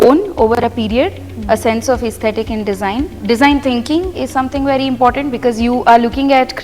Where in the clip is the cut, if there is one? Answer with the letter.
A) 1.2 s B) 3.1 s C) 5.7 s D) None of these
B